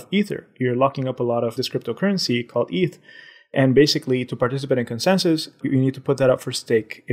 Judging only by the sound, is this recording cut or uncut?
uncut